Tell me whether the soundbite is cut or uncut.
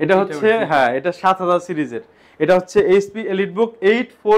uncut